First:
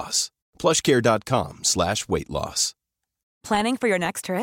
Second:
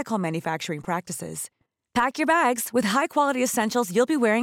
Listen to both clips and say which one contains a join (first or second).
first